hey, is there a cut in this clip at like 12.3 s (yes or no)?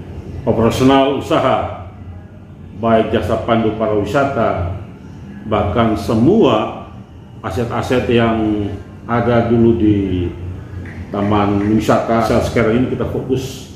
yes